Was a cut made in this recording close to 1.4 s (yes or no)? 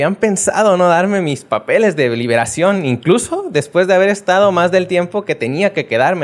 no